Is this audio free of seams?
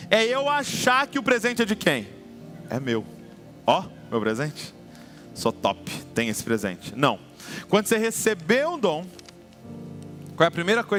yes; 0 cuts

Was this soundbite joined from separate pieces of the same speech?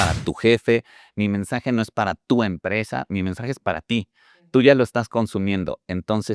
no; 0 cuts

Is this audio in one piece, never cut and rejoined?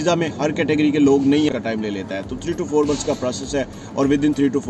no; 1 cut; at 1.5 s

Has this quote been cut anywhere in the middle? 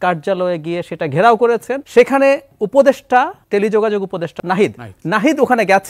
yes; 3 cuts; at 1.8 s, 3.4 s, 4.3 s

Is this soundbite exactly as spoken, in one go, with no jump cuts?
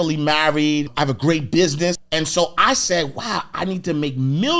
no; 2 cuts; at 0.9 s, 1.9 s

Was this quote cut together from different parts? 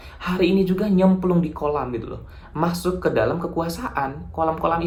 no; 0 cuts

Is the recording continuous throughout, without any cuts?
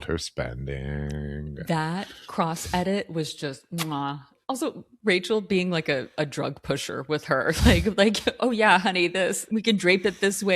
no; 2 cuts; at 4.3 s, 9.4 s

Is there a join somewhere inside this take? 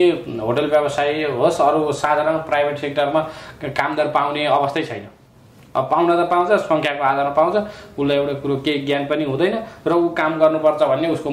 no; 0 cuts

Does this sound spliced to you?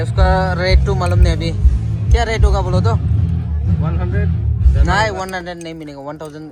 no; 0 cuts

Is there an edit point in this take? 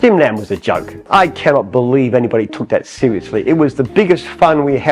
yes; 1 cut; at 1.0 s

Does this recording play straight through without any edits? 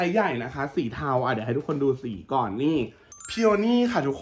no; 1 cut; at 3.0 s

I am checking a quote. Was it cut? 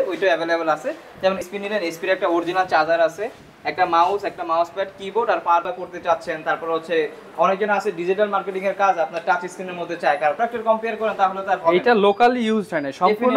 yes; 3 cuts; at 1.4 s, 5.7 s, 10.4 s

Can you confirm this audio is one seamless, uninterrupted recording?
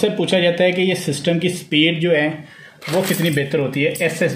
yes; 0 cuts

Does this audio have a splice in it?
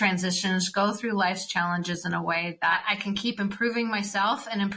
yes; 1 cut; at 2.8 s

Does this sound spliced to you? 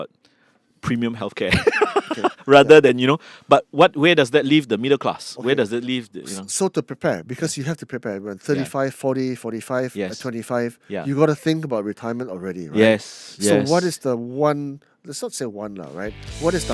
no; 0 cuts

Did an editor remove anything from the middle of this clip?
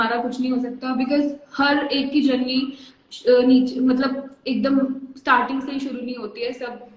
no; 0 cuts

